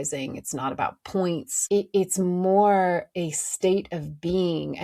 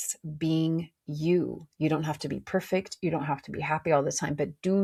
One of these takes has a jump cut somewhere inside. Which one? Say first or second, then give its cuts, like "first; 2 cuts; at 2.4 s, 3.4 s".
first; 1 cut; at 1.5 s